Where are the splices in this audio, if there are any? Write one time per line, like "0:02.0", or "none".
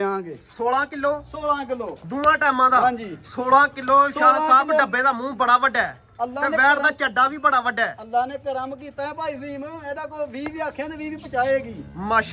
none